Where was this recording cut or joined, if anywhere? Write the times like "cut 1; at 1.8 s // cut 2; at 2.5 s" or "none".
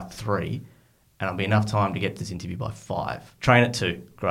cut 1; at 3.3 s